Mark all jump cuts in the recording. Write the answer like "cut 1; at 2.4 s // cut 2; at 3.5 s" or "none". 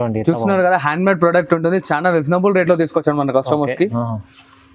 none